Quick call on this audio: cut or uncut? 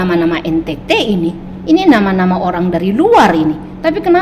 uncut